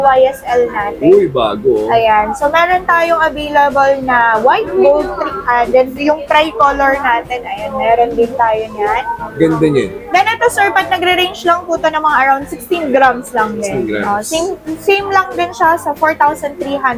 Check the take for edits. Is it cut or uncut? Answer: uncut